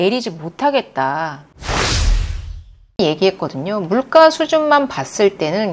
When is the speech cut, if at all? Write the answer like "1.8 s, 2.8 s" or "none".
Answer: 1.6 s, 3.0 s

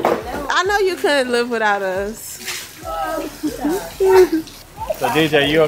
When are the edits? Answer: 4.5 s

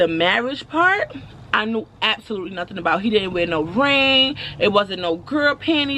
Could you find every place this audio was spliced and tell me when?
1.4 s

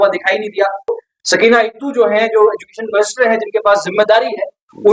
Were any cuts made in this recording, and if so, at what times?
1.0 s

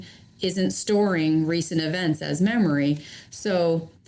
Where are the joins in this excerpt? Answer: none

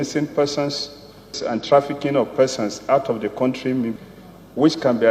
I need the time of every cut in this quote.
1.4 s, 4.0 s

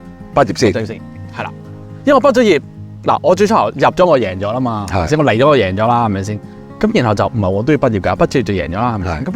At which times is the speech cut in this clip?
none

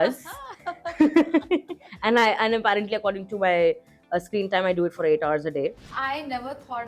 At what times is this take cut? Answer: 5.8 s

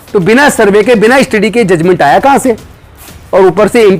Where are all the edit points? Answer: none

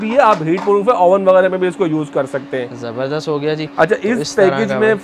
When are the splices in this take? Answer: none

